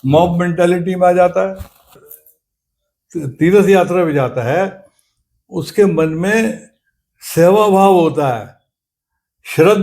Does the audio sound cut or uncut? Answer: cut